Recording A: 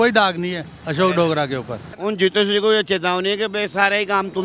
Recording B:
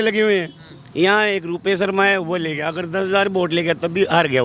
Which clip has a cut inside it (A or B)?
A